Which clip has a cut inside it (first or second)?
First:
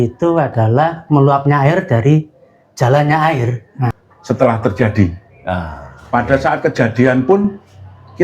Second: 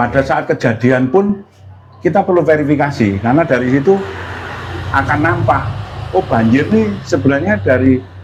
first